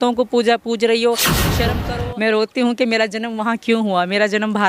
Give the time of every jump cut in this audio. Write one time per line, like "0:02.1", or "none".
0:01.7